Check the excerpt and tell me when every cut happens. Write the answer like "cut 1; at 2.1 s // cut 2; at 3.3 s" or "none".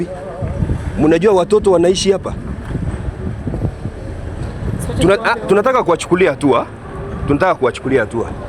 none

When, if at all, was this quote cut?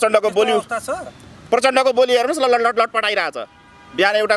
none

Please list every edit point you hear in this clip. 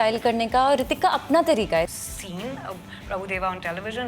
cut 1; at 1.9 s

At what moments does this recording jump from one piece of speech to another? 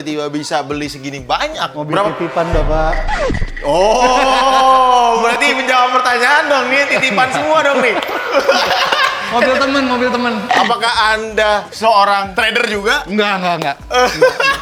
none

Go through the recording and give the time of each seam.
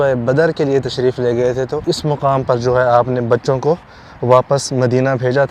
cut 1; at 1.8 s

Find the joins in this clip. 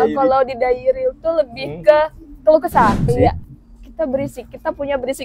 cut 1; at 3.1 s

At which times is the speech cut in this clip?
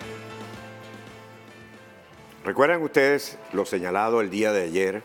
none

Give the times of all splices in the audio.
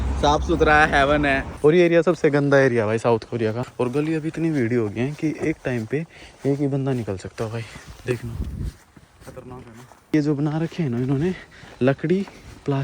cut 1; at 1.5 s // cut 2; at 3.6 s // cut 3; at 10.1 s

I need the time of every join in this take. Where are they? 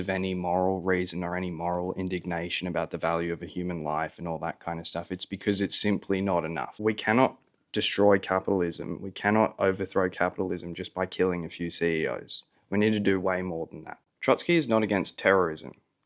cut 1; at 6.7 s // cut 2; at 14.0 s

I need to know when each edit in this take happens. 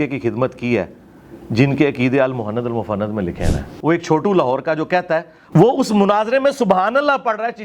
cut 1; at 3.6 s // cut 2; at 5.4 s

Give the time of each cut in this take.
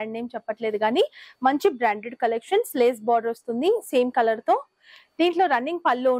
none

